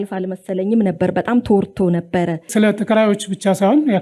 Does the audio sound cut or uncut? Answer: cut